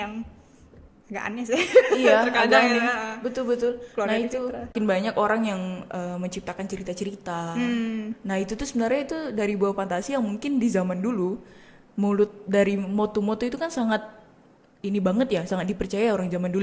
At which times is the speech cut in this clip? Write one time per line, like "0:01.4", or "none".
0:04.7